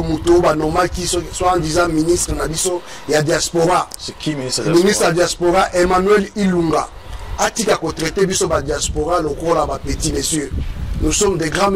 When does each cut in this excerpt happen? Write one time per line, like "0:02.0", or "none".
none